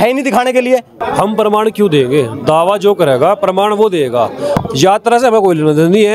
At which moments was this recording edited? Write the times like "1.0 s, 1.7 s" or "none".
0.9 s, 4.6 s